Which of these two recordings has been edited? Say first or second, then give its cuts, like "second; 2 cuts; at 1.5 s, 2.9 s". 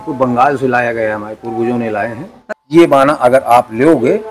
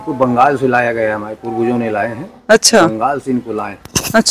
first; 1 cut; at 2.3 s